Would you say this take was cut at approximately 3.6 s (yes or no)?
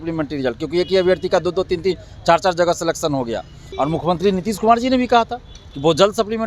yes